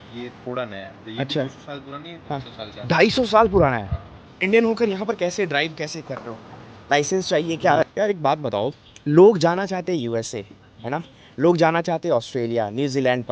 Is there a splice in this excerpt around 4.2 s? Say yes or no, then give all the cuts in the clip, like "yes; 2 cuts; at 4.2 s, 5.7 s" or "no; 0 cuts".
yes; 2 cuts; at 4.2 s, 7.9 s